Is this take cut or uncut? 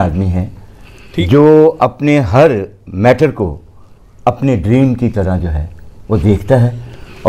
uncut